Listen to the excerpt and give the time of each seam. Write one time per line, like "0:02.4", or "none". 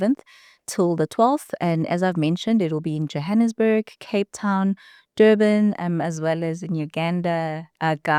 none